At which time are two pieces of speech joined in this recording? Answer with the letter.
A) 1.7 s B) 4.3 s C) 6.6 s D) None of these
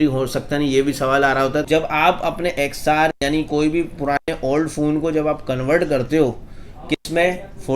A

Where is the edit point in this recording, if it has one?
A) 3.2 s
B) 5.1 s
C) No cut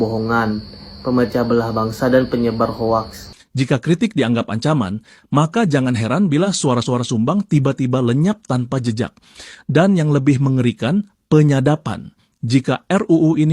A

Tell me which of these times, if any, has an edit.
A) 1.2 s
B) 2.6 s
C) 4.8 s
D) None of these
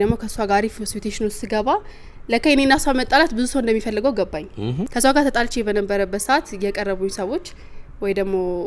C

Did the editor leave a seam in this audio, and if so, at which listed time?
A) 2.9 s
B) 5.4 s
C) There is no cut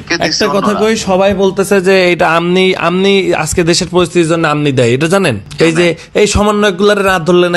B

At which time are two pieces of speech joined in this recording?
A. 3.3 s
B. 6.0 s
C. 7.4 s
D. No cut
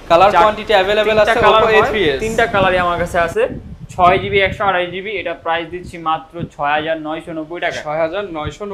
D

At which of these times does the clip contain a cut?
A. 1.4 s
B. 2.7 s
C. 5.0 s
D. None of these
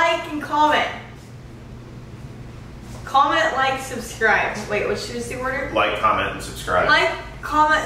D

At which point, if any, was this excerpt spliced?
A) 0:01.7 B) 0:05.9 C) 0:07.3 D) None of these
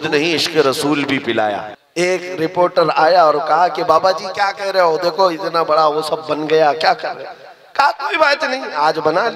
A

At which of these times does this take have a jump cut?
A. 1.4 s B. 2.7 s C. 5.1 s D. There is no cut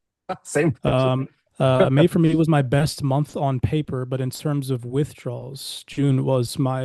A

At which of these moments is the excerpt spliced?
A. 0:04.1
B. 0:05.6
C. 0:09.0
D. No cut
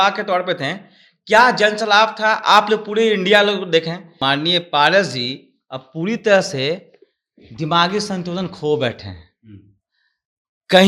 A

